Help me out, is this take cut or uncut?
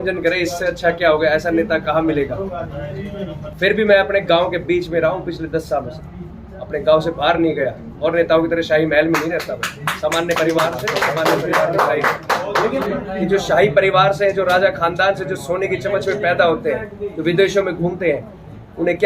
cut